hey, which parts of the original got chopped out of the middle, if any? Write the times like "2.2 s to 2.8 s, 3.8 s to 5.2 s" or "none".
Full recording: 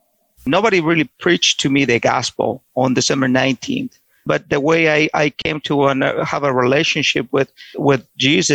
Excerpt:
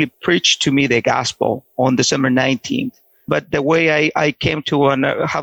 none